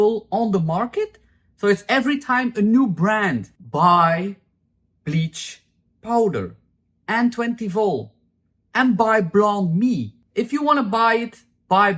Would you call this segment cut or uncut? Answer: uncut